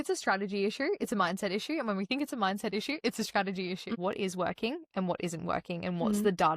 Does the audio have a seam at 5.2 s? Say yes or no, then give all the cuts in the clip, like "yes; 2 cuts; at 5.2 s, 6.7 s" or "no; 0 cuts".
no; 1 cut; at 3.9 s